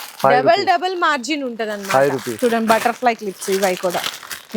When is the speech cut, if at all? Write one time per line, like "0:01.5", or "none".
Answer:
0:02.3

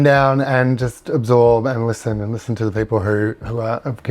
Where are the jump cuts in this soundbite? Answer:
none

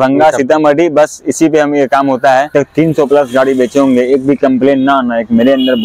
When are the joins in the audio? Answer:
0:02.5

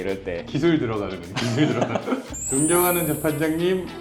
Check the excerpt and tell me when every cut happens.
0:02.4

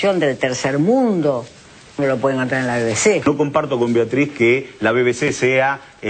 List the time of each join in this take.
0:03.2

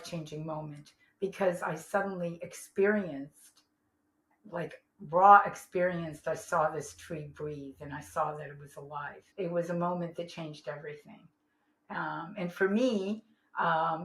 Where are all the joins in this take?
0:09.2

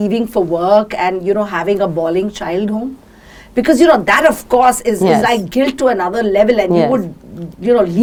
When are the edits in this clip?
none

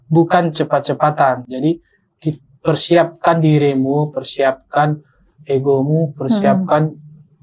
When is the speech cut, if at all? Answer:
0:01.5

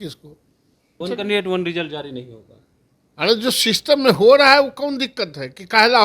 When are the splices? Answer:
0:01.0

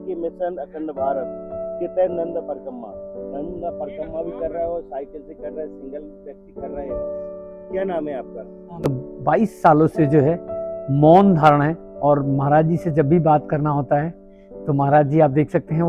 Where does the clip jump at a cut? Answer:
0:08.8

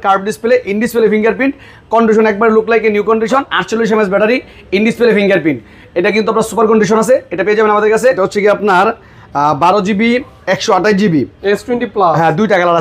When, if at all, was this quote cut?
0:03.6
0:08.2

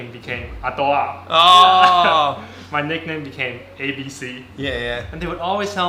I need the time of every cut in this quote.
none

